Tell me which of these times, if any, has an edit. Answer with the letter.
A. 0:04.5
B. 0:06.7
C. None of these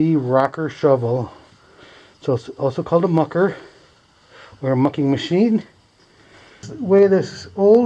B